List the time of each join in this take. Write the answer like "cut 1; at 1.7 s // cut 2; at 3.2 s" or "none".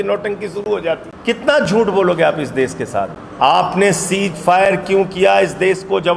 cut 1; at 1.1 s // cut 2; at 3.2 s

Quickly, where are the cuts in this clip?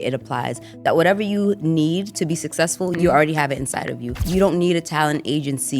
cut 1; at 2.9 s // cut 2; at 4.2 s

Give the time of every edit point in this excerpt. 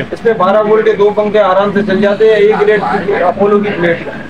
none

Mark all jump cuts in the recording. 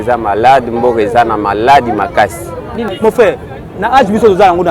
cut 1; at 2.9 s

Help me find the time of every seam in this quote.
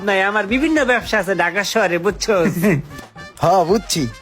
none

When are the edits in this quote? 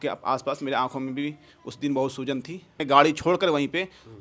cut 1; at 2.8 s

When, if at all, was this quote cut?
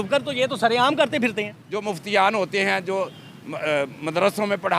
cut 1; at 1.6 s

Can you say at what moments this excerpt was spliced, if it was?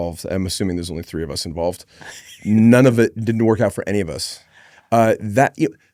none

